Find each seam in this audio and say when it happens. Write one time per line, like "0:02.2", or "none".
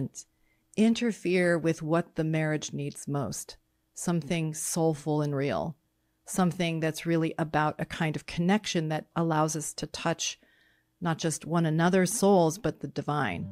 none